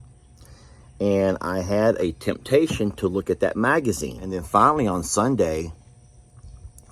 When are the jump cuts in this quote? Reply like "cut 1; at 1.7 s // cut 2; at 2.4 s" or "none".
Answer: cut 1; at 4.3 s